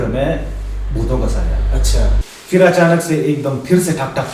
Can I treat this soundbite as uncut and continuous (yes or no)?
no